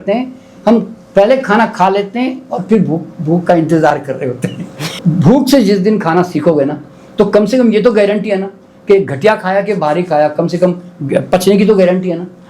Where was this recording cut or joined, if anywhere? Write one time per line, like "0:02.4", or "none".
0:04.9